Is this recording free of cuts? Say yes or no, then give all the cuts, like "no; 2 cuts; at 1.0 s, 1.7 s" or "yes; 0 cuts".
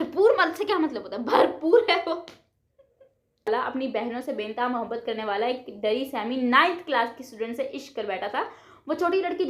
no; 1 cut; at 3.5 s